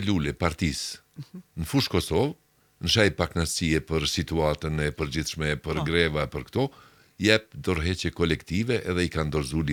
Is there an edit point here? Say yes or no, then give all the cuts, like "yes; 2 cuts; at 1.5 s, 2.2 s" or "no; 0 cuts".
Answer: no; 0 cuts